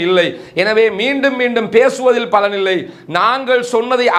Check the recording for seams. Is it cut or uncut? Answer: uncut